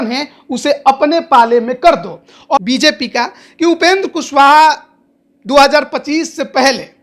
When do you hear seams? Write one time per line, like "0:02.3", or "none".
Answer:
0:02.6